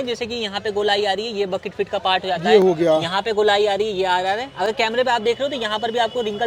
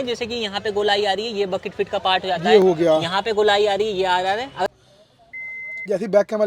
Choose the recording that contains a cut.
second; 1 cut; at 4.7 s

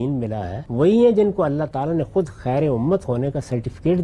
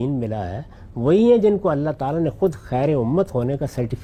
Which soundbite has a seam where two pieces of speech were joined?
first; 1 cut; at 0.9 s

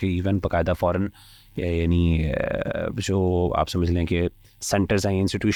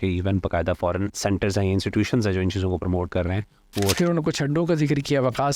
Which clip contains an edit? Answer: second; 2 cuts; at 1.1 s, 3.9 s

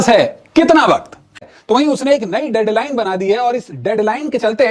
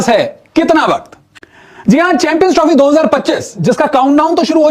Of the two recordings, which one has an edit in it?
first; 1 cut; at 1.5 s

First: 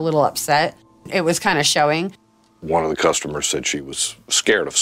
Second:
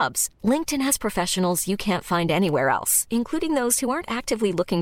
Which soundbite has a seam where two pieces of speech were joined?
first; 3 cuts; at 1.1 s, 2.2 s, 3.7 s

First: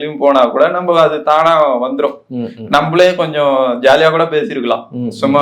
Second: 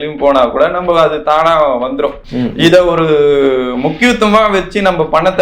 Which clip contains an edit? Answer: second; 1 cut; at 2.3 s

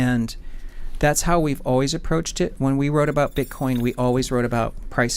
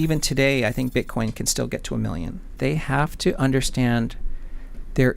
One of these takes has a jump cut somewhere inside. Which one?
second; 1 cut; at 2.5 s

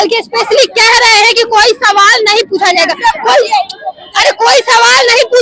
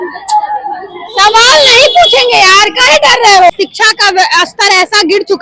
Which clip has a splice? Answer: second; 1 cut; at 3.5 s

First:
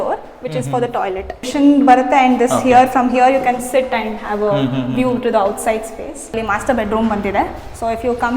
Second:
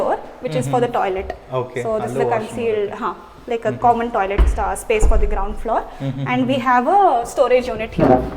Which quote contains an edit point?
first; 2 cuts; at 1.5 s, 6.3 s

